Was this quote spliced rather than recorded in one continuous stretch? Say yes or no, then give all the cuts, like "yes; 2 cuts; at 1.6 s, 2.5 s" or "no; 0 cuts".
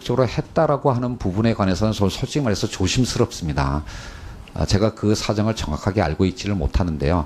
yes; 1 cut; at 2.9 s